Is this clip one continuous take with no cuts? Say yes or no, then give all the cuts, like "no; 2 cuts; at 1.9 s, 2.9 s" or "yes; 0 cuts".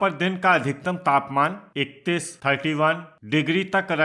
no; 2 cuts; at 1.7 s, 3.1 s